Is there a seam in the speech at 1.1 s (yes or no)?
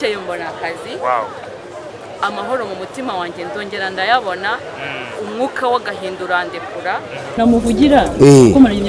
no